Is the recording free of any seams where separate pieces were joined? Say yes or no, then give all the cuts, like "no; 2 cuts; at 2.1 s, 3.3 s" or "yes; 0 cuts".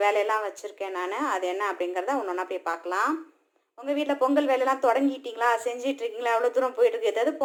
yes; 0 cuts